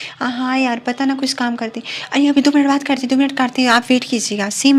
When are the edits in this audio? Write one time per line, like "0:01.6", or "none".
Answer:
none